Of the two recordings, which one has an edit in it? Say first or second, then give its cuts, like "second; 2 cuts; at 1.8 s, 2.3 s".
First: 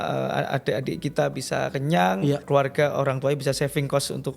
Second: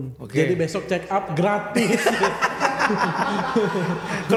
first; 1 cut; at 2.4 s